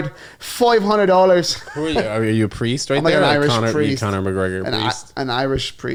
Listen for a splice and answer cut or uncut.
uncut